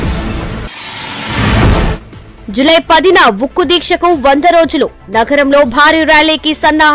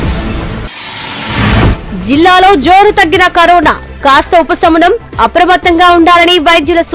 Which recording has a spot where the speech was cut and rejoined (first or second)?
second